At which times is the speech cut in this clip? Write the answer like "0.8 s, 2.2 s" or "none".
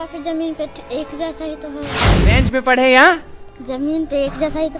2.0 s